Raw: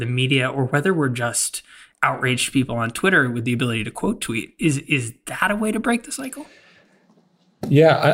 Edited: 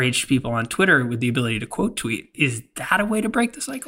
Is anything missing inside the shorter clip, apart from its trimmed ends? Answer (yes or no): yes